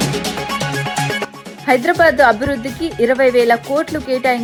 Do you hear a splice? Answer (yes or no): no